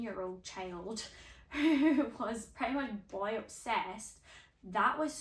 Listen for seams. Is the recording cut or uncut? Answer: uncut